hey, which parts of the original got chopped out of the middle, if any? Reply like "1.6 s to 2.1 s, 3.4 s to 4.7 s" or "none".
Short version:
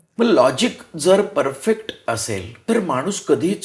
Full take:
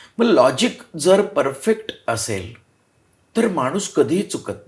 2.5 s to 3.2 s